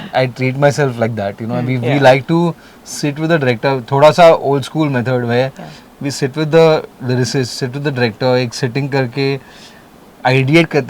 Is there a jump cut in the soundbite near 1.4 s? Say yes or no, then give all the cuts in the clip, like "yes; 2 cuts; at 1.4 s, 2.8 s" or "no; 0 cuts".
no; 0 cuts